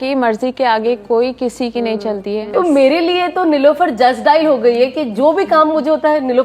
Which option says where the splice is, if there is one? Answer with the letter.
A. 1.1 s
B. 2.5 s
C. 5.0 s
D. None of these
B